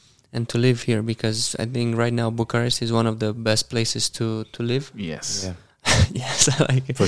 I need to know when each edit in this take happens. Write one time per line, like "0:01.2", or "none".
none